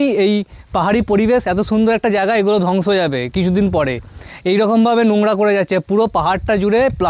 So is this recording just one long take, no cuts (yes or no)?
yes